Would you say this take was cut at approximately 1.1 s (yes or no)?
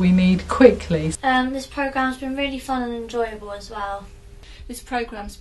yes